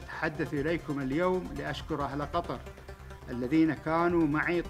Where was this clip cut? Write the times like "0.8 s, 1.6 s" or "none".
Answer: none